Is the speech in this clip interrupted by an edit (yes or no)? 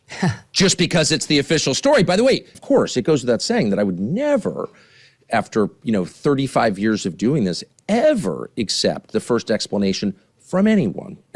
yes